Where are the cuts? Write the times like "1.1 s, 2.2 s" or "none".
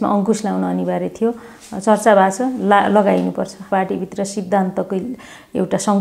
3.6 s